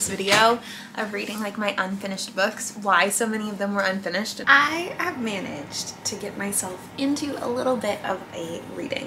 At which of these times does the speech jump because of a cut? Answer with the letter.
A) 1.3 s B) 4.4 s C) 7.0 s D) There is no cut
B